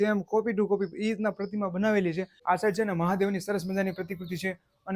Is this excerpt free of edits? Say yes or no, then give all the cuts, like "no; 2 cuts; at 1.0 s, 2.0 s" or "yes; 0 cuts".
no; 1 cut; at 2.3 s